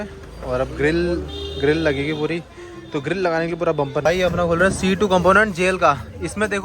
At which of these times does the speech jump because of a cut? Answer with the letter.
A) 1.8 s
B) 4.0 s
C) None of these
B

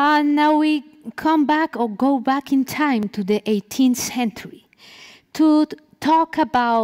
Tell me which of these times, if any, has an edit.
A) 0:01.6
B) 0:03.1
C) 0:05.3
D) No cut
B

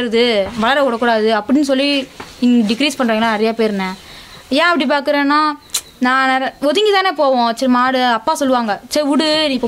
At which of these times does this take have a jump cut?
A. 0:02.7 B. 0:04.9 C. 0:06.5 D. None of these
D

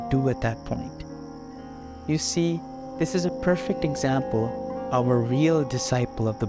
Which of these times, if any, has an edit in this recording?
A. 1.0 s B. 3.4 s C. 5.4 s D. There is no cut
D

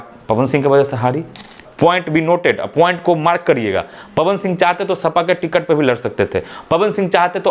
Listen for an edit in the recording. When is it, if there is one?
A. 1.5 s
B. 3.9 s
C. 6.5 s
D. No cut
A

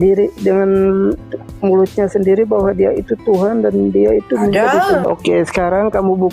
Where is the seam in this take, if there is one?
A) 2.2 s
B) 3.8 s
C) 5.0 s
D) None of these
C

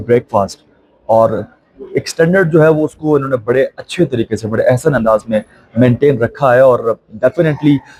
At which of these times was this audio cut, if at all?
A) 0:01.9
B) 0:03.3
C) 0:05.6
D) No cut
D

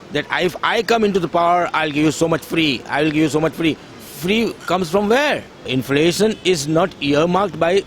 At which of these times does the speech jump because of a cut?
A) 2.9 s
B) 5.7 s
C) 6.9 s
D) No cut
B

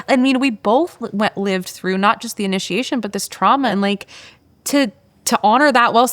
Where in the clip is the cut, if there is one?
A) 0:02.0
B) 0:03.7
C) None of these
B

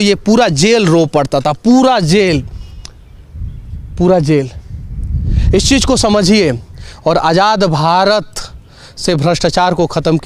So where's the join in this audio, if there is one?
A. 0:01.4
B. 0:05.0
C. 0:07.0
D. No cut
D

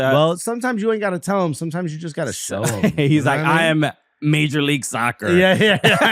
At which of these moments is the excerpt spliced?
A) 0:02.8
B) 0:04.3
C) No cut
C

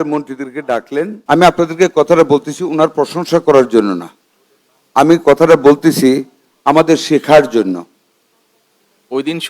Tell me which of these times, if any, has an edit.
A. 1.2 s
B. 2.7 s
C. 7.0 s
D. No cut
A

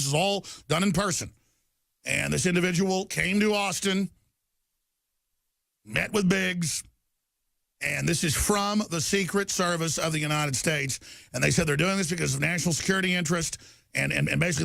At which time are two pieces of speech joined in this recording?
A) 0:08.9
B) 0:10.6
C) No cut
B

